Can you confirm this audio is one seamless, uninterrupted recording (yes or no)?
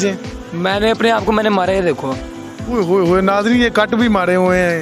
yes